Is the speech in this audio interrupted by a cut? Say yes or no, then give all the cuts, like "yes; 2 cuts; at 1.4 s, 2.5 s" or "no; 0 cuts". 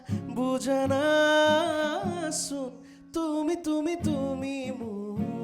no; 0 cuts